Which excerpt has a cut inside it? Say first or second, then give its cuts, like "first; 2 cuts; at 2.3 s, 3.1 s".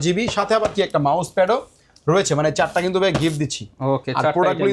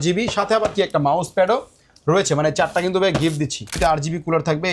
second; 1 cut; at 3.7 s